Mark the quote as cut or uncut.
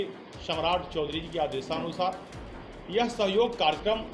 uncut